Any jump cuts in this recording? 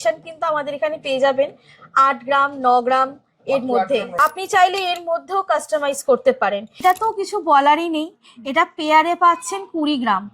yes; 2 cuts; at 4.1 s, 6.8 s

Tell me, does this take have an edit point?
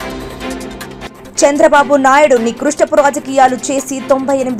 yes; 1 cut; at 1.0 s

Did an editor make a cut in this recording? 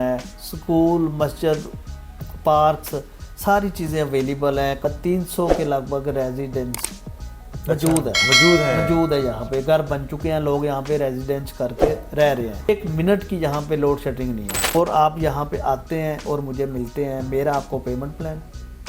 yes; 3 cuts; at 4.8 s, 12.7 s, 14.7 s

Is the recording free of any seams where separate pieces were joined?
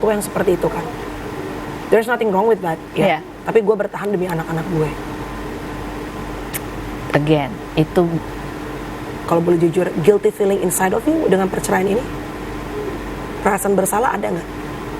no; 1 cut; at 9.1 s

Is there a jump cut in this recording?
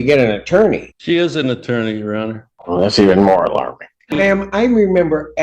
yes; 3 cuts; at 0.9 s, 2.5 s, 4.2 s

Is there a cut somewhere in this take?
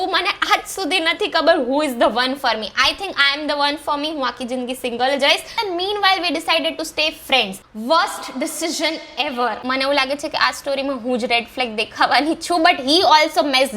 yes; 2 cuts; at 5.5 s, 9.6 s

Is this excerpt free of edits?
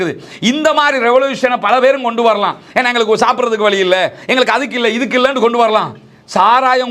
yes; 0 cuts

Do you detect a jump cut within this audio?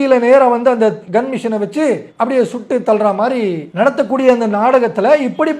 yes; 3 cuts; at 1.0 s, 2.1 s, 3.6 s

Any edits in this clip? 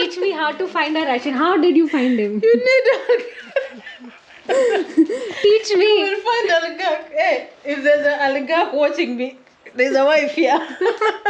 no; 0 cuts

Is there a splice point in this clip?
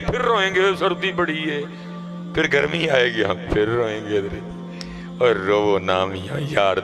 no; 0 cuts

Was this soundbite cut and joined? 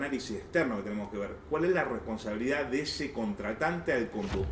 no; 0 cuts

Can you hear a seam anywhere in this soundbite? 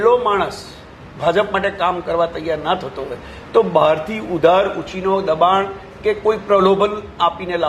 no; 0 cuts

